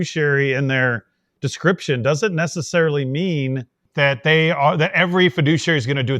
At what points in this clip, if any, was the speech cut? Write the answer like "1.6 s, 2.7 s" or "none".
none